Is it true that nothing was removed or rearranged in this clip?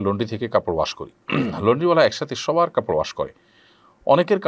yes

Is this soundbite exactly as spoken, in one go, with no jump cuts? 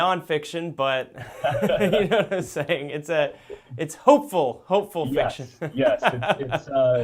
yes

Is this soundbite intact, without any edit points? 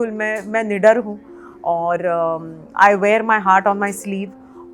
yes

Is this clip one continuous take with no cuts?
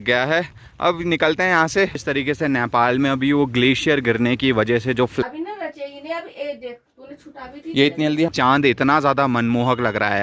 no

